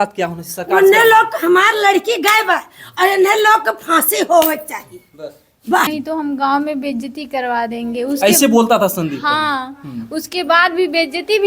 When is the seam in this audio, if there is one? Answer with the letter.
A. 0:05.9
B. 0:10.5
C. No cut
A